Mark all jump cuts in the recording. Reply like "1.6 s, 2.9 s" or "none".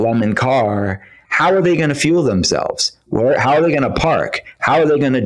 none